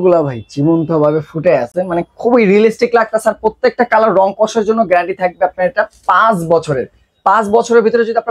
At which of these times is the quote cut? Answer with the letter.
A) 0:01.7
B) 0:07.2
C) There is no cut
C